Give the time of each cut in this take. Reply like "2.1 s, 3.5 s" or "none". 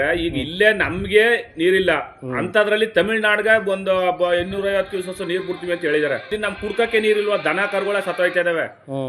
6.3 s